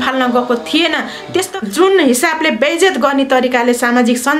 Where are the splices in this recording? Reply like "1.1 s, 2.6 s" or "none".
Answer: 1.5 s